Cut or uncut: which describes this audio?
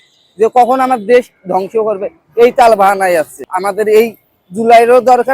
cut